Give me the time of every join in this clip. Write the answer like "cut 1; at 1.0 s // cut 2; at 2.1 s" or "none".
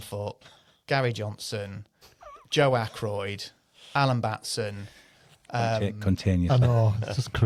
none